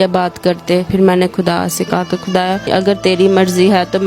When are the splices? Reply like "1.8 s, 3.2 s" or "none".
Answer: 0.9 s, 2.7 s